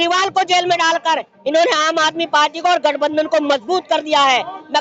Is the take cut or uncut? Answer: uncut